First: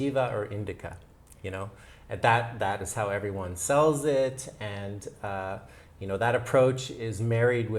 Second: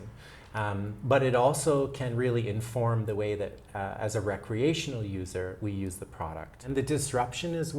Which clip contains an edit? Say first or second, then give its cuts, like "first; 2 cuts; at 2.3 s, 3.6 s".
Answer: second; 1 cut; at 6.5 s